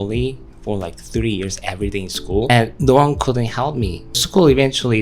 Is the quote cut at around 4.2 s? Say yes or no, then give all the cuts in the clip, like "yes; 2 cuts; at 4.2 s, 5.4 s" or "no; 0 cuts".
yes; 2 cuts; at 2.5 s, 4.2 s